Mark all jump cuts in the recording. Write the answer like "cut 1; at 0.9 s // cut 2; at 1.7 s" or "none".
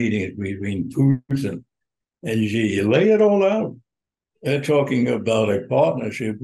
none